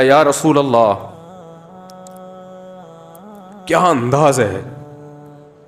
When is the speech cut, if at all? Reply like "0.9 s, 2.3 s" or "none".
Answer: 1.1 s, 3.7 s, 4.7 s